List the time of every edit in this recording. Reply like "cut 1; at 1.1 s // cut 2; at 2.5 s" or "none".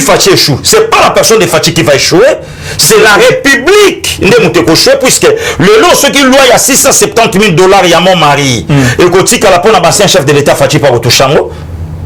none